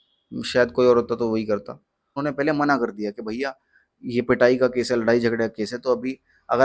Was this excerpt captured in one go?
no; 1 cut; at 2.2 s

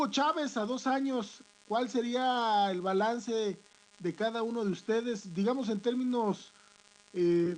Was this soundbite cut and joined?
no; 0 cuts

